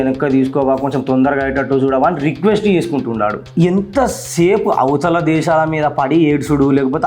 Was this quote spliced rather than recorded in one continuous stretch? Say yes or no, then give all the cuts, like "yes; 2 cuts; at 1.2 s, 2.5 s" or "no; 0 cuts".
yes; 1 cut; at 3.4 s